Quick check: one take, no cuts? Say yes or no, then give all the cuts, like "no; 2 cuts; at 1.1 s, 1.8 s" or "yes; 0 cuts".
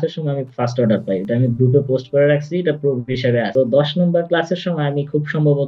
yes; 0 cuts